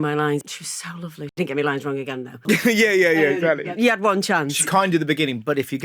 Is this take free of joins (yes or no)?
no